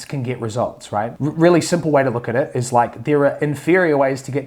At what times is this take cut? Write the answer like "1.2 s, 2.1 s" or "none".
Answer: none